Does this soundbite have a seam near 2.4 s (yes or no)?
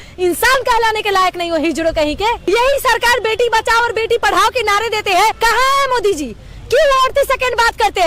yes